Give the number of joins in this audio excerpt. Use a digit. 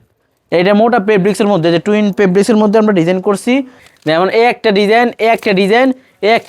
1